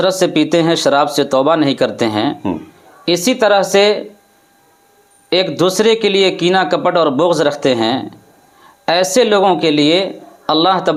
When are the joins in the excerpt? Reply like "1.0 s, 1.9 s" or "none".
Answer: none